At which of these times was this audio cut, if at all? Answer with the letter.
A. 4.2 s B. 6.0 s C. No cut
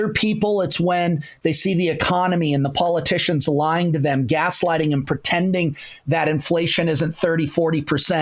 C